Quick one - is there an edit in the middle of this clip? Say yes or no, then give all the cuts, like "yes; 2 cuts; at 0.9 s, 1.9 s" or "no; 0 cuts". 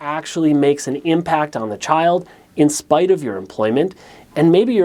no; 0 cuts